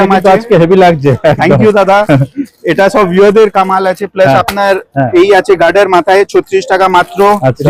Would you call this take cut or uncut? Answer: uncut